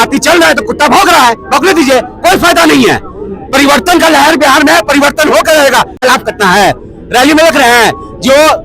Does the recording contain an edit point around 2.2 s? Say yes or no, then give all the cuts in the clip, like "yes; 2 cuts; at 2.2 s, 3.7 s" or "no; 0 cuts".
no; 1 cut; at 6.0 s